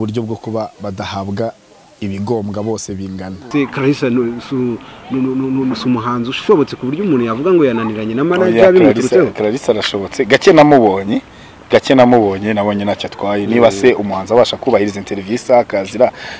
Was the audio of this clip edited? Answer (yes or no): yes